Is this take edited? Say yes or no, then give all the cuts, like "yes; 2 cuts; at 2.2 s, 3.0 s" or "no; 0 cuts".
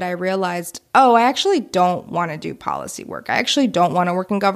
no; 0 cuts